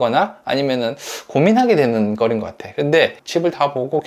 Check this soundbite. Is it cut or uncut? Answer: cut